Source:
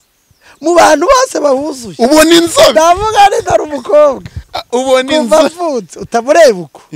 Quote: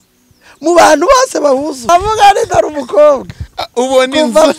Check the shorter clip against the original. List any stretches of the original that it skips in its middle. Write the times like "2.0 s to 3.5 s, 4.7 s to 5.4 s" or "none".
1.9 s to 2.8 s